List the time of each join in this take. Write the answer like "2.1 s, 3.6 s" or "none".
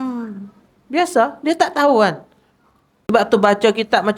3.1 s